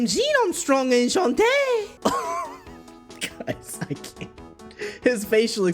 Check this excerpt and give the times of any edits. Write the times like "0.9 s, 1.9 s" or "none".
1.9 s